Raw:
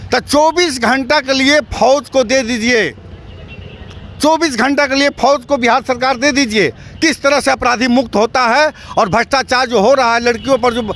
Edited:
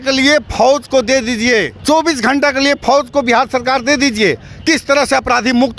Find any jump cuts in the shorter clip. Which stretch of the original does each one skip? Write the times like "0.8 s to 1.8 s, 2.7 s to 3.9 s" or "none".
3.0 s to 4.1 s